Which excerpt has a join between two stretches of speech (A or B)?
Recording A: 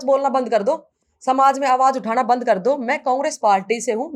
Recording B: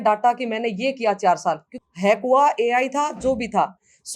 B